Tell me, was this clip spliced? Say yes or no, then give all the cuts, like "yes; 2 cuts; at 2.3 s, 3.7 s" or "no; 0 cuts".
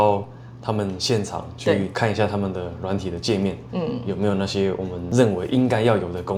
no; 0 cuts